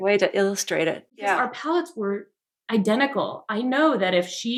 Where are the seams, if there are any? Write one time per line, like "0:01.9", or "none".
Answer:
none